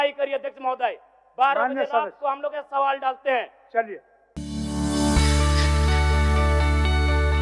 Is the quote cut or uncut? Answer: uncut